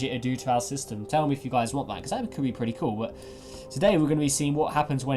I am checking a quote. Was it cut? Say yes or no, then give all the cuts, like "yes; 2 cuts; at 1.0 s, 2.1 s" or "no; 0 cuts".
no; 0 cuts